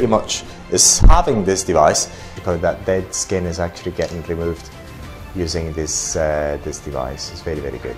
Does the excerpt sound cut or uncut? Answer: cut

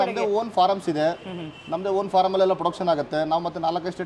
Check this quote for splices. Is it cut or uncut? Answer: uncut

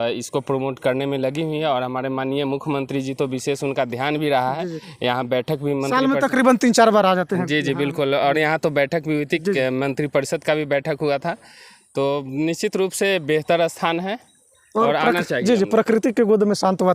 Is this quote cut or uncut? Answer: uncut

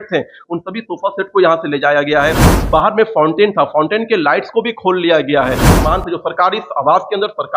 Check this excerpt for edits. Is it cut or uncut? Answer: cut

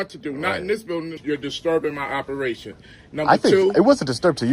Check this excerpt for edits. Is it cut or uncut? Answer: cut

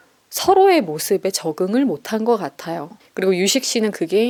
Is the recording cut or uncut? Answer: uncut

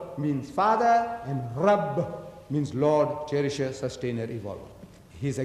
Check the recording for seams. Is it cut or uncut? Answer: cut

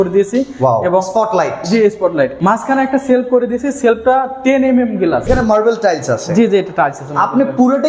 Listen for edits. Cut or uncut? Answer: cut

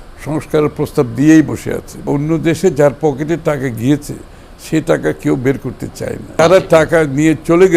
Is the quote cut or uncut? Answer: cut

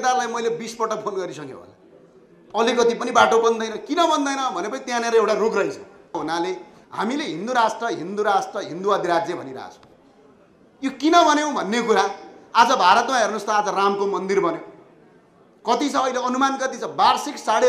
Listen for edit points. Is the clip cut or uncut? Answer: cut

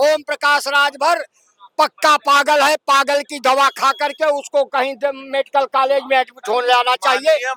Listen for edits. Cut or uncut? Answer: uncut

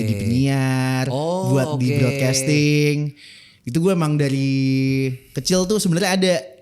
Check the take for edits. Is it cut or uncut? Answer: uncut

